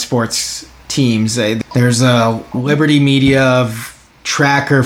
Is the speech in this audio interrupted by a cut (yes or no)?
yes